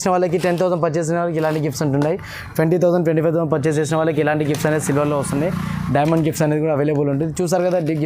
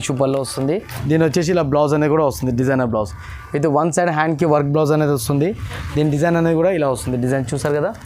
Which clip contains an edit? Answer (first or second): second